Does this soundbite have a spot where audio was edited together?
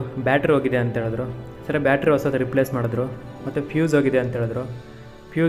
no; 0 cuts

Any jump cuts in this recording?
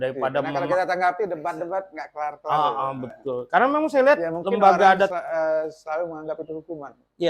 yes; 1 cut; at 5.1 s

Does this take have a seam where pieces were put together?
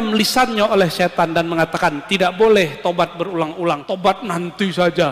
yes; 1 cut; at 3.9 s

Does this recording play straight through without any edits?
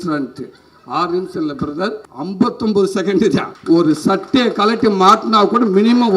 no; 2 cuts; at 2.1 s, 3.5 s

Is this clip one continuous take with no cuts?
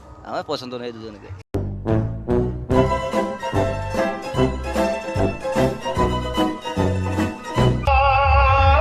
no; 1 cut; at 7.9 s

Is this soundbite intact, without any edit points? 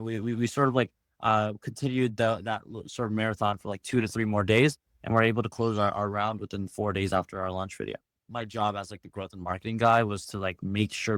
no; 1 cut; at 8.2 s

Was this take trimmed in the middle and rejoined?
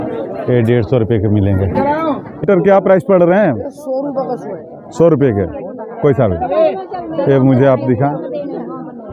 yes; 1 cut; at 2.4 s

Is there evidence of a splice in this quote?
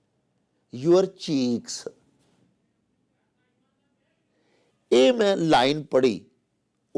no; 0 cuts

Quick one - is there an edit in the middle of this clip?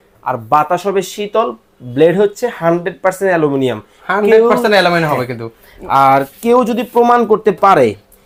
no; 0 cuts

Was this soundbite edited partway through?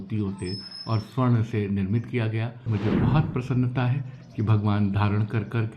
yes; 1 cut; at 2.7 s

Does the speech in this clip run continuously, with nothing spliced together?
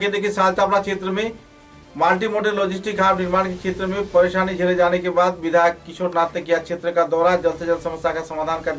yes; 0 cuts

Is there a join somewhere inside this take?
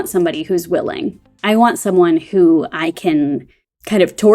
no; 0 cuts

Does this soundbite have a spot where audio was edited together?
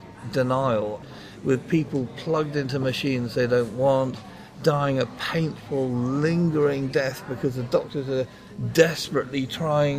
yes; 1 cut; at 1.0 s

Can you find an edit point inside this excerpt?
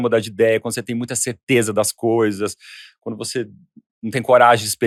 no; 0 cuts

